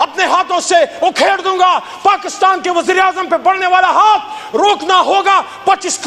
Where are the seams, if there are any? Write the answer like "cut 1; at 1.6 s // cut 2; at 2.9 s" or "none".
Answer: none